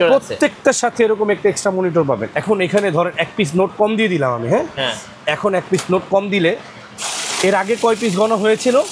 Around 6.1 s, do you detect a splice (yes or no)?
no